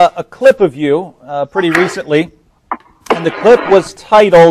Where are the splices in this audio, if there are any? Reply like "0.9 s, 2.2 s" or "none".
2.0 s